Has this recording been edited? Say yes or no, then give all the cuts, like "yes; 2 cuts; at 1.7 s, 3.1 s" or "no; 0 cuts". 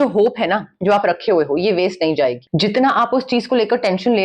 yes; 1 cut; at 2.4 s